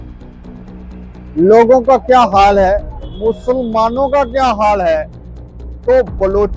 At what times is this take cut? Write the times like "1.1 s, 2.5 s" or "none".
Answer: none